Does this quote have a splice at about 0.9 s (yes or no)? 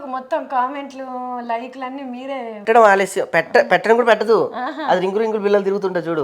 no